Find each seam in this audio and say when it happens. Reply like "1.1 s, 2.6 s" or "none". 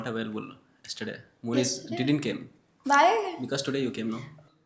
none